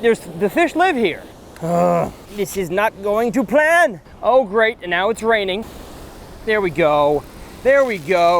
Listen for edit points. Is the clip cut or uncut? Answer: cut